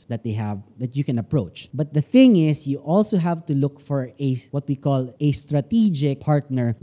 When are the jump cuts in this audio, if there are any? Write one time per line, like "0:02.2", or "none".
none